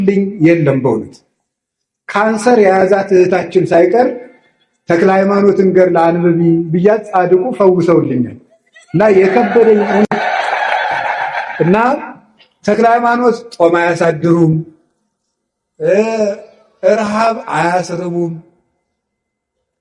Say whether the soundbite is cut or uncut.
cut